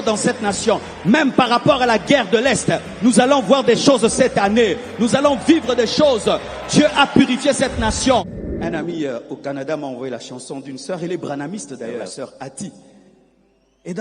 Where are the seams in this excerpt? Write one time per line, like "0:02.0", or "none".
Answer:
0:08.4
0:12.1